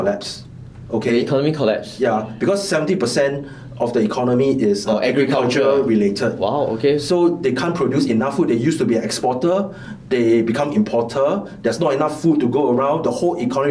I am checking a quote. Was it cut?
no; 0 cuts

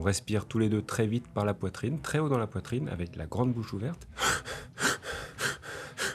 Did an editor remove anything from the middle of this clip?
no; 0 cuts

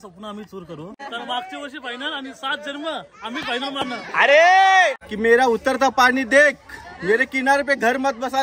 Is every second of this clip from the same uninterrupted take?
no; 2 cuts; at 1.0 s, 5.1 s

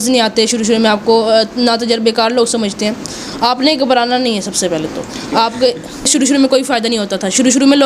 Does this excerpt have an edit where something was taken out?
yes; 1 cut; at 6.1 s

